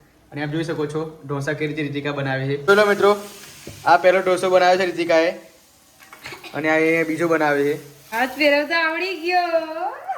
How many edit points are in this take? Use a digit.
2